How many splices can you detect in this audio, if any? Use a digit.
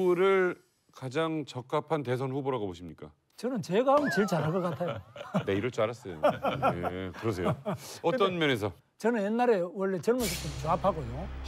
0